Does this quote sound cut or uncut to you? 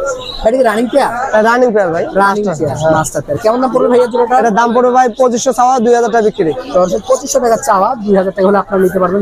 uncut